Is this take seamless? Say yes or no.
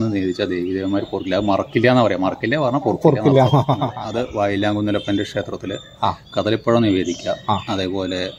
no